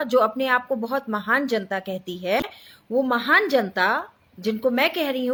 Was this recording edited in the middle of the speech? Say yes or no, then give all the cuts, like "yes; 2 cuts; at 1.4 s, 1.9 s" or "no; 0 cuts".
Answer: no; 0 cuts